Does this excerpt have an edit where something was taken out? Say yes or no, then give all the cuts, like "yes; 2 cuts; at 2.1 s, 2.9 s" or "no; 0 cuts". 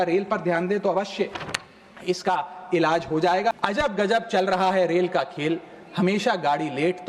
yes; 1 cut; at 3.5 s